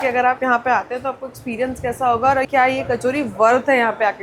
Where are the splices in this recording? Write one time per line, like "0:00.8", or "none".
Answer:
0:02.5